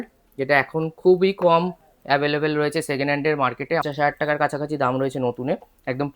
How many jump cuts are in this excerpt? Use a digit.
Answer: 1